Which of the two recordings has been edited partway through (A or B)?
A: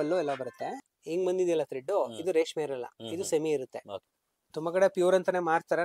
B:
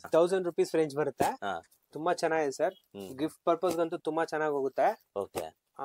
A